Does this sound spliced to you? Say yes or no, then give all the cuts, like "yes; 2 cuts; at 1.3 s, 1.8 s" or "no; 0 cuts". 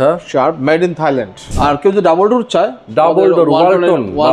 yes; 1 cut; at 1.5 s